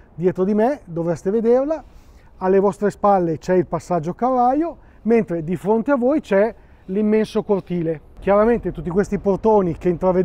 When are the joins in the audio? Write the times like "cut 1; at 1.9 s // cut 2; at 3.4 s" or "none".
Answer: cut 1; at 8.1 s

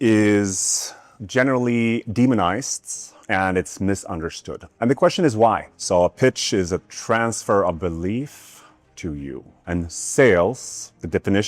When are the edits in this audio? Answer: cut 1; at 5.7 s

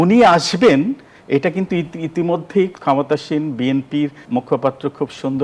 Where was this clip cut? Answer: cut 1; at 2.7 s // cut 2; at 4.2 s

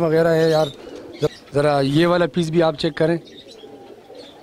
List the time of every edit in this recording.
cut 1; at 1.3 s

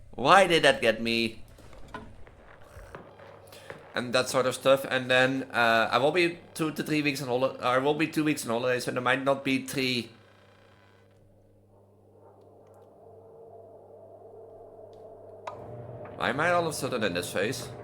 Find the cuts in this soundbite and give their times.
cut 1; at 2.5 s

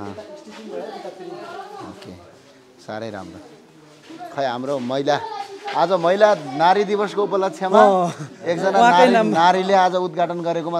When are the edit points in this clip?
none

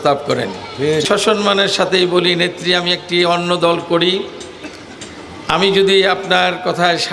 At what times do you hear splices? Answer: cut 1; at 1.0 s

